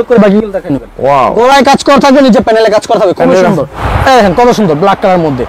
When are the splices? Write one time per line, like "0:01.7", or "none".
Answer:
0:03.8